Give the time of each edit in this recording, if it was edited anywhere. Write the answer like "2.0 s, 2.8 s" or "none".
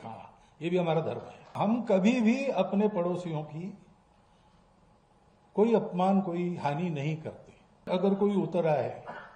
1.5 s, 7.9 s